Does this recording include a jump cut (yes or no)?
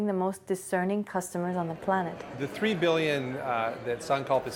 yes